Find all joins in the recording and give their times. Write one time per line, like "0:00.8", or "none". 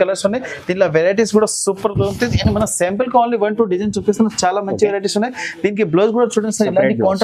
none